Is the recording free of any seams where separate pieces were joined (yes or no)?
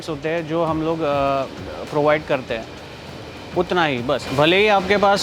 yes